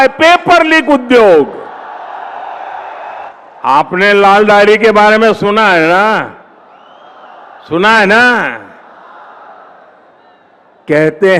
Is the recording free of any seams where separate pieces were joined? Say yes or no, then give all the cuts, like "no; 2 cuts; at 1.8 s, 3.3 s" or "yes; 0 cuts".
no; 1 cut; at 3.1 s